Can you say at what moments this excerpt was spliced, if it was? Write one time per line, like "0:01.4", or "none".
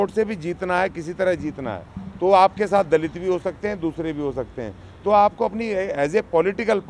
none